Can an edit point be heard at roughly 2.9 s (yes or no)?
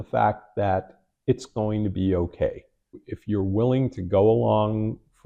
yes